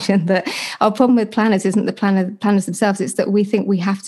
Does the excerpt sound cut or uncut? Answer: cut